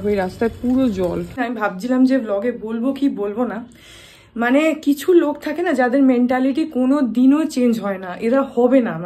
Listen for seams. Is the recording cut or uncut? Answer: cut